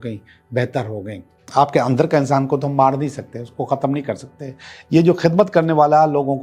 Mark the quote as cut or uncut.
cut